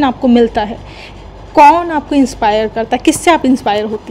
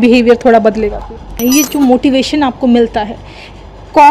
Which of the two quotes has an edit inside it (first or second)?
second